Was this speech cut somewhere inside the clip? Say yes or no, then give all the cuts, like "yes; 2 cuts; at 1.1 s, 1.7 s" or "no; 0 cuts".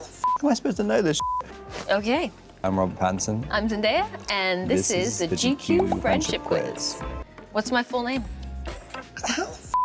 no; 0 cuts